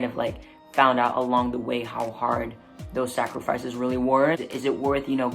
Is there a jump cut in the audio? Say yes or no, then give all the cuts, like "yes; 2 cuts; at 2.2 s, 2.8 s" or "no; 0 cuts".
yes; 1 cut; at 4.4 s